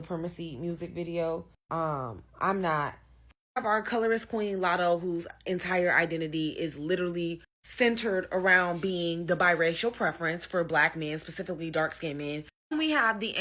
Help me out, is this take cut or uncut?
uncut